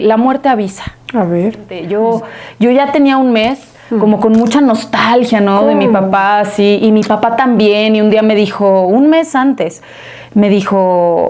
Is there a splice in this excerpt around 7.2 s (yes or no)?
no